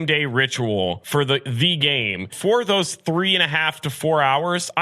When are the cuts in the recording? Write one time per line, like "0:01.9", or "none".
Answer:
0:01.0
0:02.3